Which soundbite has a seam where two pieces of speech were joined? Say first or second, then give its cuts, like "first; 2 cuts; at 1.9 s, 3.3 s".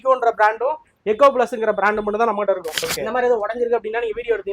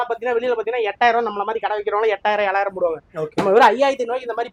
first; 1 cut; at 2.8 s